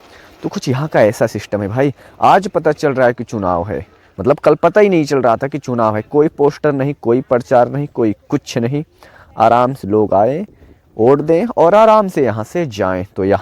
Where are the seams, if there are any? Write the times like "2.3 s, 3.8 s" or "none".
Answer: none

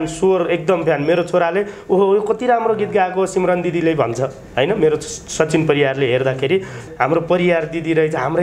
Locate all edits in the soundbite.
6.8 s

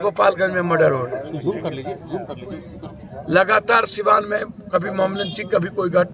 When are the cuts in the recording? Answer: none

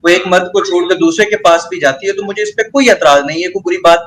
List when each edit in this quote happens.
none

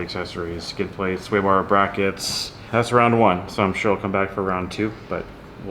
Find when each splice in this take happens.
2.5 s

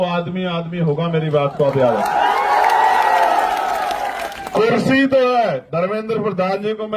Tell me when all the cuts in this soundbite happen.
4.3 s

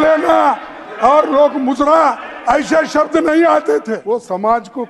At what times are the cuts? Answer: 4.0 s

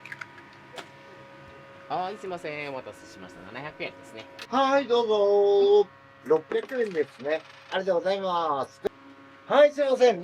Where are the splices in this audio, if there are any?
4.4 s, 8.9 s

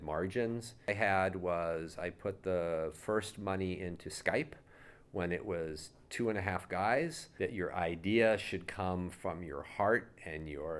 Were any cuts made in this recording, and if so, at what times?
0.9 s, 7.2 s

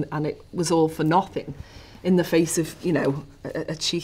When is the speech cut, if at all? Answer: none

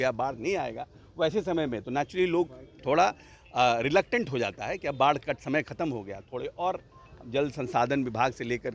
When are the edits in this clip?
none

